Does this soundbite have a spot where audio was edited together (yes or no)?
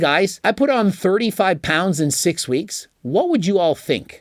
no